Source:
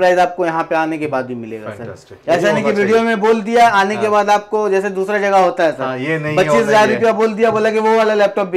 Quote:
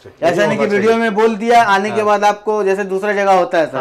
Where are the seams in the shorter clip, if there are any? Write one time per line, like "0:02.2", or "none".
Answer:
none